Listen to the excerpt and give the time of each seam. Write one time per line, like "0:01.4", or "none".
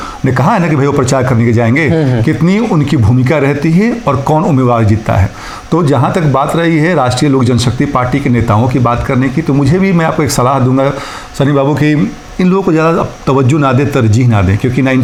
none